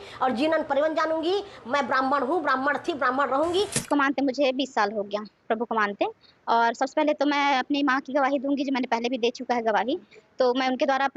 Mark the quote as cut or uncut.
cut